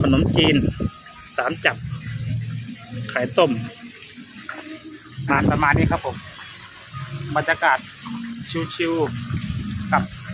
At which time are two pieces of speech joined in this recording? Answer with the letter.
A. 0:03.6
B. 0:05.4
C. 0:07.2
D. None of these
B